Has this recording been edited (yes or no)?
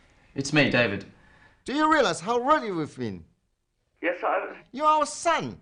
no